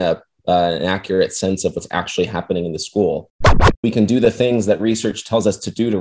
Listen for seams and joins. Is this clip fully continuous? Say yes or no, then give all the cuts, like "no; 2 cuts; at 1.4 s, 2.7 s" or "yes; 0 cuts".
no; 1 cut; at 3.4 s